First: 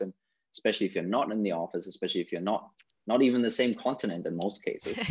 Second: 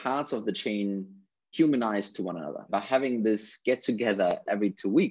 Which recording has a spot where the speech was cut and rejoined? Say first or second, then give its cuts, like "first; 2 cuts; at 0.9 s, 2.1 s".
second; 3 cuts; at 1.5 s, 2.7 s, 4.3 s